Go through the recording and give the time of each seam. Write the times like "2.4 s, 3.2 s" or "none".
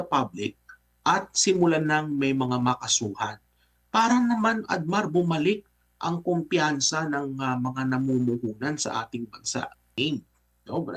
9.9 s